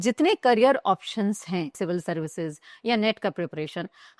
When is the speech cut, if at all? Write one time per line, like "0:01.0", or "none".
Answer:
0:01.8

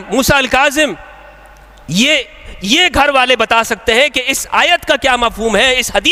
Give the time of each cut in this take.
none

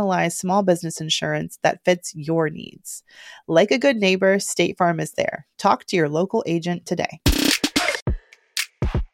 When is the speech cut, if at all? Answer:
0:08.0

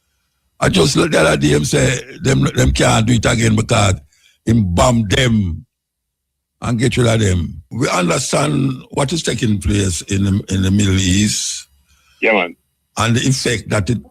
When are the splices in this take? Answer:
0:07.6

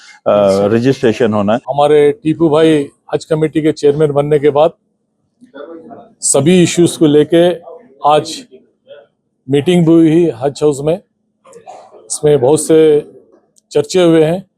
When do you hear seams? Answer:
0:01.7

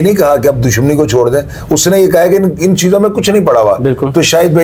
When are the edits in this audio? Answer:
none

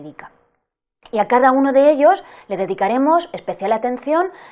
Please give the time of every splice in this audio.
none

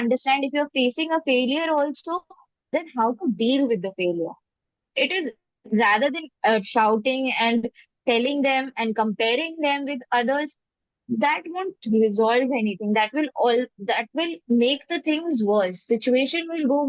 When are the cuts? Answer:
none

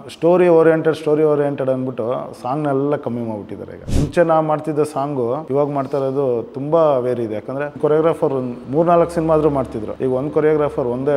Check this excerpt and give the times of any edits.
0:03.8
0:05.4
0:07.8
0:09.8

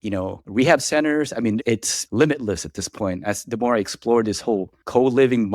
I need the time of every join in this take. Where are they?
0:01.6

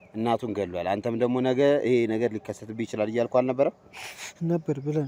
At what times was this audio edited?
none

